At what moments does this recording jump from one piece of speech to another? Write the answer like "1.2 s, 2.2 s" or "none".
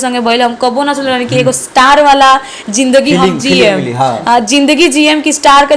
none